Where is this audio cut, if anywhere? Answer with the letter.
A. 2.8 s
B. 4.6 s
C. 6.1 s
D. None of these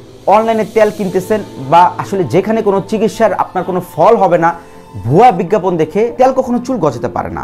C